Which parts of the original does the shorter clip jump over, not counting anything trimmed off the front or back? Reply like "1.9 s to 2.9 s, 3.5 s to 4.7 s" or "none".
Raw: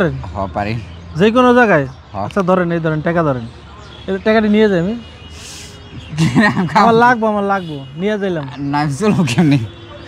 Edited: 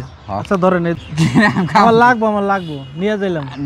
2.8 s to 6.0 s